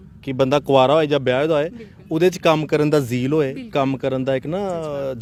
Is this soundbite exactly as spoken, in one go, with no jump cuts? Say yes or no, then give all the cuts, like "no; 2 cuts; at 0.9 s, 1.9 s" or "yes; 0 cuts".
yes; 0 cuts